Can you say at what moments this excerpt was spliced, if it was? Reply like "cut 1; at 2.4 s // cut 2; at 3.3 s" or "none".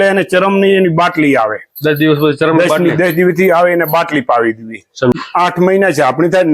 cut 1; at 5.1 s